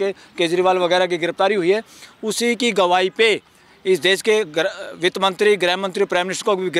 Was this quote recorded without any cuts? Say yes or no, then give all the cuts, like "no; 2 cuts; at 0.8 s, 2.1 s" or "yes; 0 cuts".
yes; 0 cuts